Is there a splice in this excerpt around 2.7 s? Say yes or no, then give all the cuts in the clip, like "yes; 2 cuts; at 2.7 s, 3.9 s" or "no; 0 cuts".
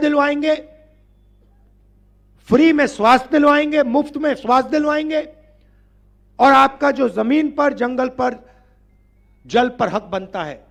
no; 0 cuts